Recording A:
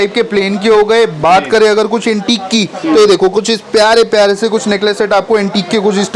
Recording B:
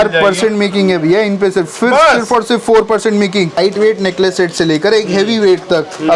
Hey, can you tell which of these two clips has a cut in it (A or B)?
B